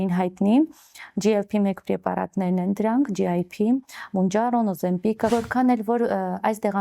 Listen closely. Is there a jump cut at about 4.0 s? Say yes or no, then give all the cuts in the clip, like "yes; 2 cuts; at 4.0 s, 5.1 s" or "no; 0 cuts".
no; 1 cut; at 5.3 s